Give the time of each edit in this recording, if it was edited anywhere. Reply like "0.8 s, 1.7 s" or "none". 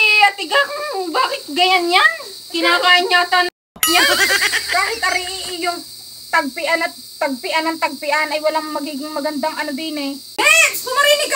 10.4 s